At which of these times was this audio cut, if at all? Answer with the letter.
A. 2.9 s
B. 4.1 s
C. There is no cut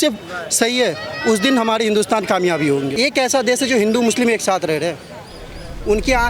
A